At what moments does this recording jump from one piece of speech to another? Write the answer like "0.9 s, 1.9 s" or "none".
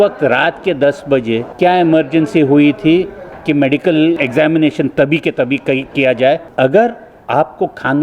1.5 s, 4.2 s, 6.5 s